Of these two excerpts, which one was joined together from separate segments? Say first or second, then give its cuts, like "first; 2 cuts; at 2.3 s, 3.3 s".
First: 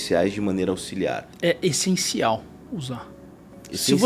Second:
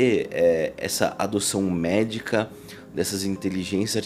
first; 1 cut; at 1.3 s